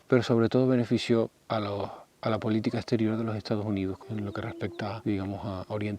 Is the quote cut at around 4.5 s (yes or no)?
yes